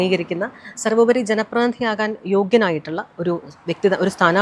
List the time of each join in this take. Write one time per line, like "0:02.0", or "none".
none